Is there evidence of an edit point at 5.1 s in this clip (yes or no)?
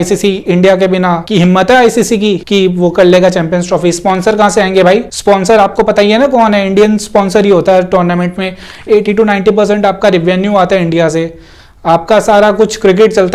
yes